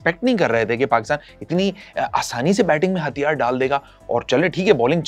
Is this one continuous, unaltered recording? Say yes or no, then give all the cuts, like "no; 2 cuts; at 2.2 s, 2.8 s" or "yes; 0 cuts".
yes; 0 cuts